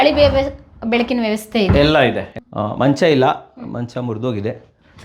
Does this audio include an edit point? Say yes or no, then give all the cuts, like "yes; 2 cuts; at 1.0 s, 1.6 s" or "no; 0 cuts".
yes; 1 cut; at 2.3 s